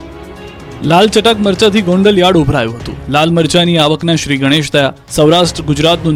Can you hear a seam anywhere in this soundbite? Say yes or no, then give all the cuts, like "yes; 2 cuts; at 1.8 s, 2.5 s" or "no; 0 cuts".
no; 0 cuts